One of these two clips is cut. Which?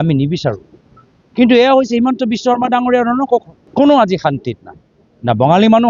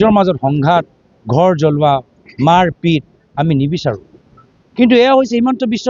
first; 1 cut; at 3.6 s

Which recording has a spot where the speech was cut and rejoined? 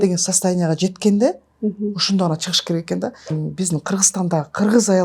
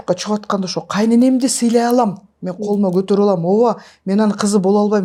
first; 1 cut; at 3.3 s

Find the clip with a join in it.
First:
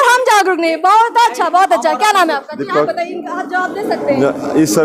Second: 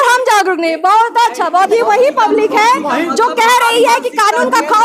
second; 1 cut; at 1.7 s

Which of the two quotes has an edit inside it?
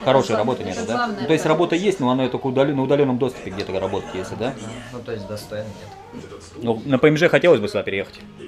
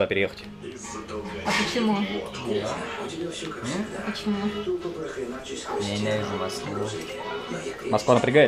first; 1 cut; at 6.2 s

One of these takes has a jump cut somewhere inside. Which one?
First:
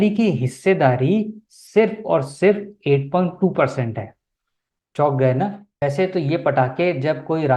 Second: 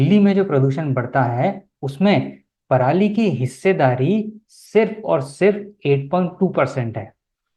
first; 1 cut; at 5.8 s

